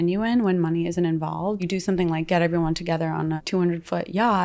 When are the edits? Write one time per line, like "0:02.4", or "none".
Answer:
0:01.7
0:03.4